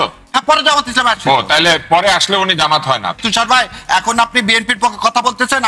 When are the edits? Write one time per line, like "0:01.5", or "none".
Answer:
0:03.1